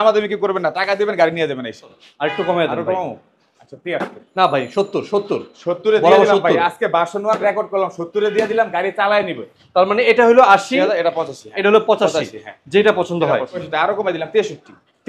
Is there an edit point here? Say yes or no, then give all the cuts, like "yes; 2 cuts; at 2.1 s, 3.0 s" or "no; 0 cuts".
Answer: yes; 3 cuts; at 1.9 s, 9.4 s, 13.6 s